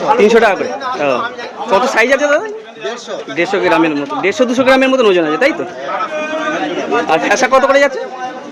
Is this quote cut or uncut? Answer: uncut